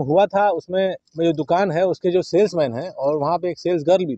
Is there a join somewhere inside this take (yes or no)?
yes